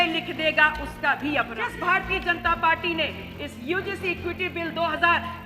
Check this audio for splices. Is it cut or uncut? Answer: cut